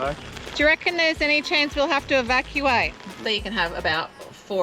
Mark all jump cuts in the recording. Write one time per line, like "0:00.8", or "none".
0:03.2